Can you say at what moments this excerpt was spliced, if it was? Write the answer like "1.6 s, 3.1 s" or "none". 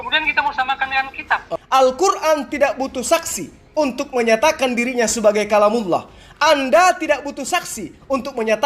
1.4 s